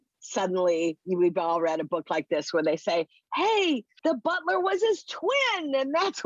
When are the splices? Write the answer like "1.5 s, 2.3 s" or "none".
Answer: 3.9 s